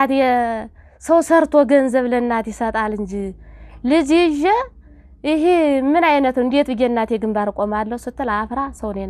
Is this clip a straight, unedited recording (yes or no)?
yes